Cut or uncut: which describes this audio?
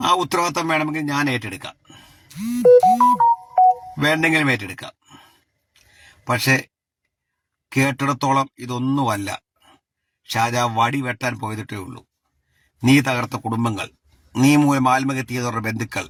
uncut